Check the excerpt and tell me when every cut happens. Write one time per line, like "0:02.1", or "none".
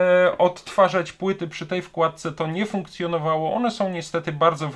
none

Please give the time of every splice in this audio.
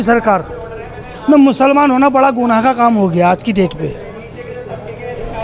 none

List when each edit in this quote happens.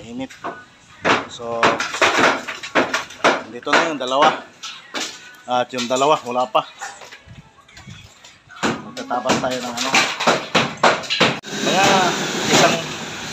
0:11.5

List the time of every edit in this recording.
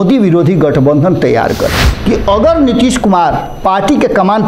0:01.9

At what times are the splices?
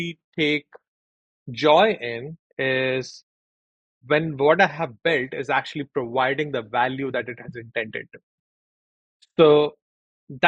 none

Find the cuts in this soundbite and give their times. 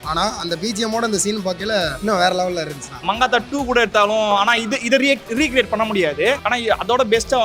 0:01.9
0:02.9
0:06.4

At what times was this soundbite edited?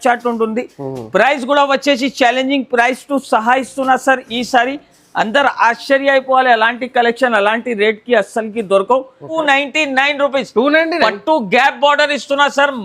0:09.4

